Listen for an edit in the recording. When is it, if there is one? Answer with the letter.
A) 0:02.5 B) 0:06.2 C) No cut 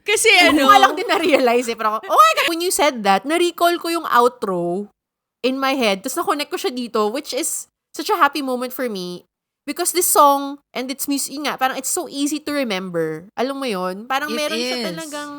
A